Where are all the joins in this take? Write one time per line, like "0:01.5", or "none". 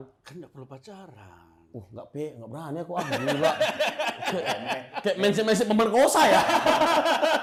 none